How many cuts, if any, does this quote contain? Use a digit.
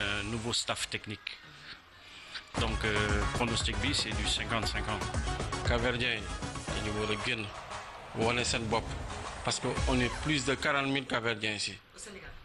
0